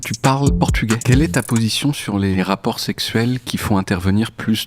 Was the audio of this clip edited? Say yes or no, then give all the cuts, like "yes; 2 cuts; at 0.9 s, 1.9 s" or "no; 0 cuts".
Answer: yes; 2 cuts; at 1.0 s, 2.4 s